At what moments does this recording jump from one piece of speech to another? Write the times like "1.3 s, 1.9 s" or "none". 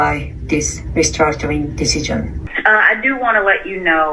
2.5 s